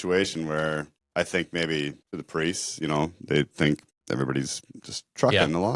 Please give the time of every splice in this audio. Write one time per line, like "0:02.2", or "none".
0:01.0
0:02.1
0:03.9